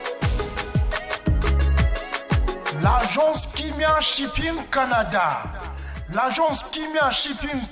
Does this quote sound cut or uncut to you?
cut